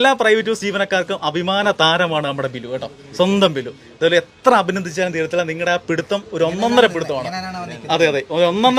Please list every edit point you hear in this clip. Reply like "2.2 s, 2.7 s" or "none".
none